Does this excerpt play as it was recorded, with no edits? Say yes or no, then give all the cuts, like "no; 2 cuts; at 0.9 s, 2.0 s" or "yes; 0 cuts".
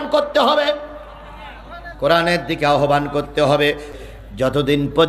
no; 1 cut; at 3.9 s